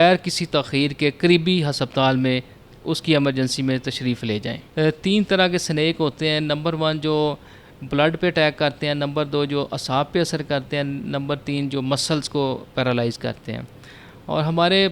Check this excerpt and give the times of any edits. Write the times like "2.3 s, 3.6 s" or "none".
4.6 s